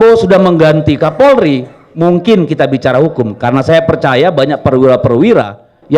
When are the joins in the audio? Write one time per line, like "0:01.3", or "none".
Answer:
none

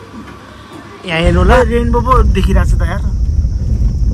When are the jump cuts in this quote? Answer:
0:01.5

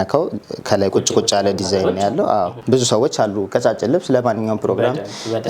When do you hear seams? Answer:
0:02.6

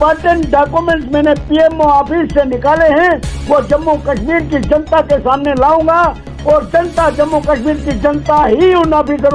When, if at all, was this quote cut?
none

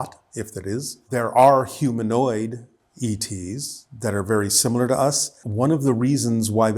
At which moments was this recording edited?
0:01.1
0:05.4

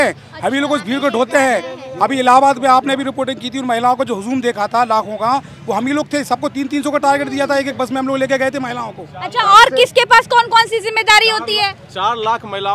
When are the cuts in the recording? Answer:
none

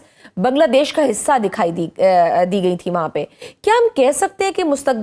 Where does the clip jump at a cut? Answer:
none

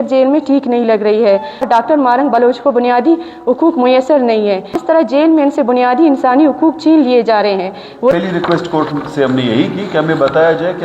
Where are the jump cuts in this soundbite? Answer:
0:01.6
0:04.7
0:08.1

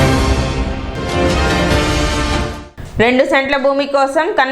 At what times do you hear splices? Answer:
0:02.6

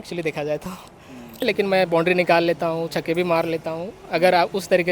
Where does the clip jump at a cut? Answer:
0:01.4

